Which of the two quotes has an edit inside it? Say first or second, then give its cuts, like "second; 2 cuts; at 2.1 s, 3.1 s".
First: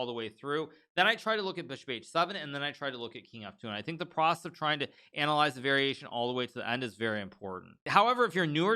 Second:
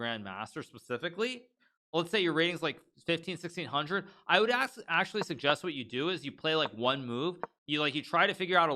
first; 1 cut; at 7.9 s